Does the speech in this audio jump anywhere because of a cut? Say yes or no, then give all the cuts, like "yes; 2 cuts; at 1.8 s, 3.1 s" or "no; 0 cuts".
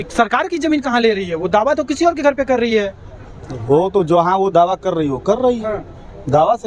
no; 0 cuts